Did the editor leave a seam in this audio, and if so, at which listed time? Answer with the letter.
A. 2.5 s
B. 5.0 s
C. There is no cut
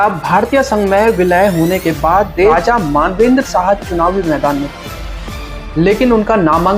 A